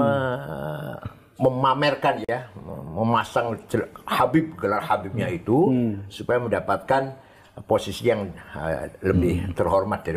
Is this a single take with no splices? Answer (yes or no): yes